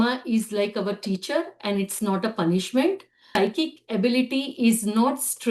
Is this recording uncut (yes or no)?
no